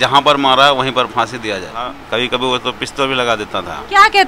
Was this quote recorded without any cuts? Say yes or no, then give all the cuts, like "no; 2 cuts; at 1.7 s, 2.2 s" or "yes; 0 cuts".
no; 1 cut; at 2.0 s